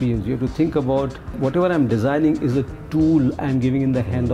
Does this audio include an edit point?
yes; 1 cut; at 1.4 s

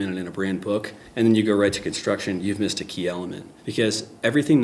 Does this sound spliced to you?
yes; 1 cut; at 1.0 s

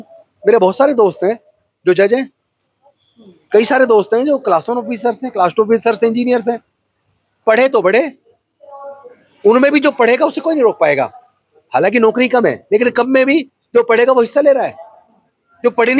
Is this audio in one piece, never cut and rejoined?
yes; 0 cuts

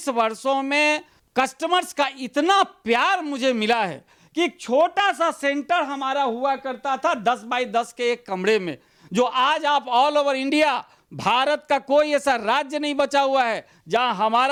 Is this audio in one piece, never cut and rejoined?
yes; 0 cuts

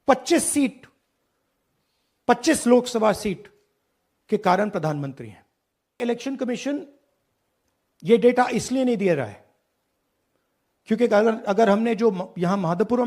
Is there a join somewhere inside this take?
yes; 1 cut; at 6.0 s

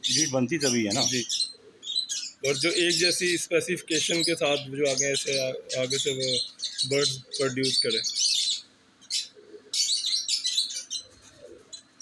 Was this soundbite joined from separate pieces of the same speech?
no; 0 cuts

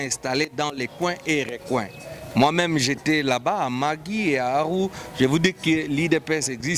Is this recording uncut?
yes; 0 cuts

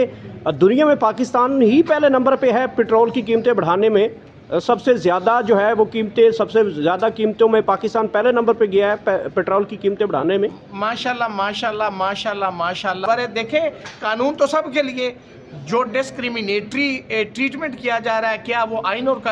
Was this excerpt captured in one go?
no; 1 cut; at 13.0 s

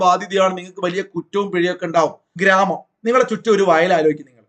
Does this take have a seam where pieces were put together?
yes; 1 cut; at 2.4 s

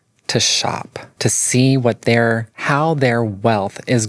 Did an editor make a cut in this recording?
yes; 2 cuts; at 1.0 s, 2.5 s

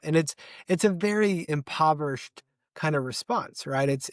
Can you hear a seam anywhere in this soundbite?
yes; 1 cut; at 1.5 s

